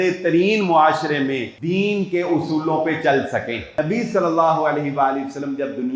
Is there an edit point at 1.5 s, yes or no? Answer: yes